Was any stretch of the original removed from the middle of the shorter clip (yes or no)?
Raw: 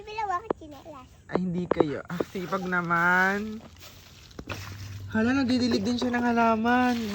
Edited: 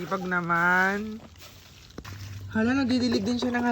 yes